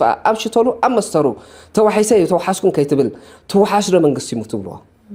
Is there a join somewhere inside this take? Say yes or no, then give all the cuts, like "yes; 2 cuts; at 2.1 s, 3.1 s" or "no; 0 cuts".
no; 0 cuts